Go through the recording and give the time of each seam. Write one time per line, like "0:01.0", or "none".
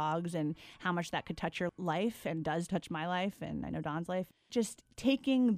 0:01.7
0:02.7
0:04.5